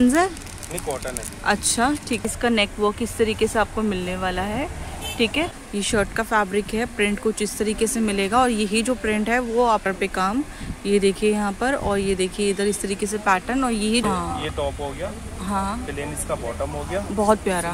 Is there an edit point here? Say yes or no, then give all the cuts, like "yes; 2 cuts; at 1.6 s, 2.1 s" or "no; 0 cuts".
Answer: yes; 4 cuts; at 2.3 s, 5.6 s, 9.8 s, 14.0 s